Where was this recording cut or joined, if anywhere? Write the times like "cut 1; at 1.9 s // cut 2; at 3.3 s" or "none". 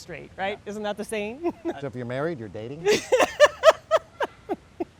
cut 1; at 1.8 s